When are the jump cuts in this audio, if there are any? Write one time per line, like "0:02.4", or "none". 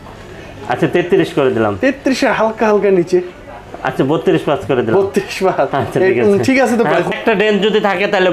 0:07.1